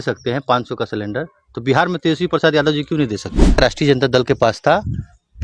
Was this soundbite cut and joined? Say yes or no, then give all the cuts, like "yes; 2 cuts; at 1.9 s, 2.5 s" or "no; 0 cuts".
yes; 1 cut; at 3.6 s